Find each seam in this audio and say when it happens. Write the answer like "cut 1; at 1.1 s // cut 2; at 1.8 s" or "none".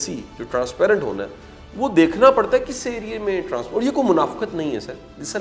none